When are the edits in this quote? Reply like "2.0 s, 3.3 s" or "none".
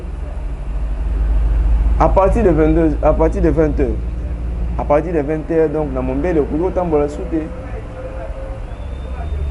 none